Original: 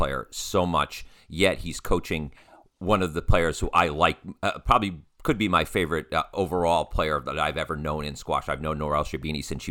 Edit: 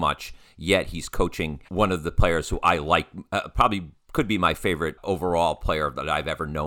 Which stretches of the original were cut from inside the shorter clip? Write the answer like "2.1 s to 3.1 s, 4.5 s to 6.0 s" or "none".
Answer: 2.3 s to 2.7 s, 6.1 s to 6.3 s